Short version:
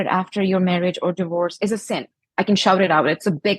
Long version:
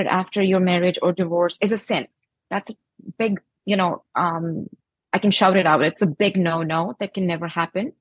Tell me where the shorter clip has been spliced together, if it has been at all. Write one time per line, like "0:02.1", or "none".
0:02.2